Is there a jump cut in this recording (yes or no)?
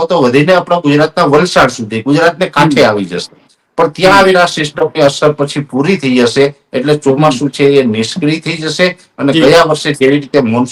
no